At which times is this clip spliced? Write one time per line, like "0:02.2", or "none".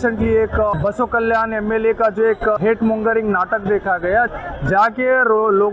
0:00.7
0:02.6
0:04.3